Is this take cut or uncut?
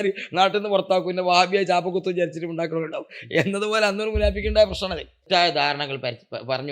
cut